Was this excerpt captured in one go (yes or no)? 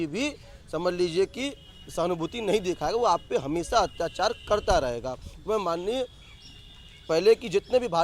yes